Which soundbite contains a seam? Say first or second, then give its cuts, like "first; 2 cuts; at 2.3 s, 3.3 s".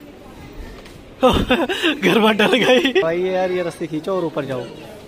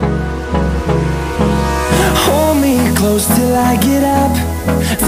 first; 1 cut; at 3.0 s